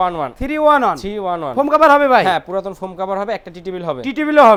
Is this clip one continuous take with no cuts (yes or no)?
yes